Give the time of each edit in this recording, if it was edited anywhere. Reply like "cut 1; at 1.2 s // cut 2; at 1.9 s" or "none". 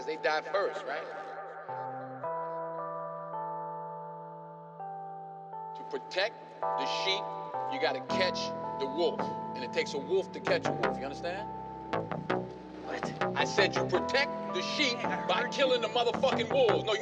none